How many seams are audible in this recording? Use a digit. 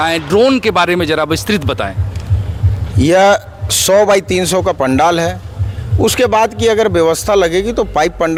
0